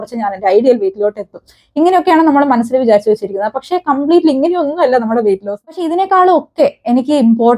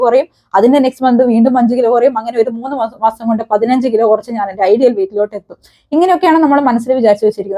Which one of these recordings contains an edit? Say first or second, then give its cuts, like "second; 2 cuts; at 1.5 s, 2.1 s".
first; 1 cut; at 5.5 s